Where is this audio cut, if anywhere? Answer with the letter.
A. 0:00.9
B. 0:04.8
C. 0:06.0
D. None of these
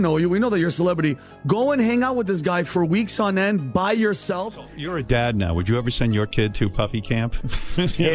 B